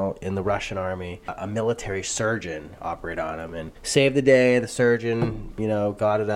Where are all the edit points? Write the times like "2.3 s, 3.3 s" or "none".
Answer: 1.3 s